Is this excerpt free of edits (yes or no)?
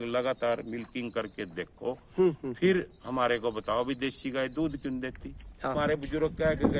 no